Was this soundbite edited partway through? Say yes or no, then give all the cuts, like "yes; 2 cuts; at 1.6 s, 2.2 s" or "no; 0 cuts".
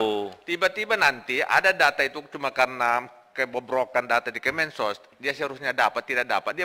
no; 0 cuts